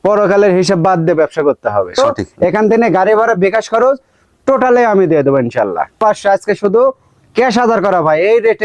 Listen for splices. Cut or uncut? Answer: cut